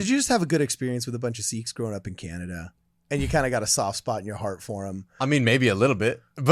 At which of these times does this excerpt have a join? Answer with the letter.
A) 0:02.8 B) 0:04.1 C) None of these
C